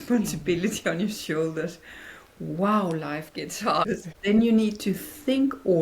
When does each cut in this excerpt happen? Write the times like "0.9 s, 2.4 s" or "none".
3.9 s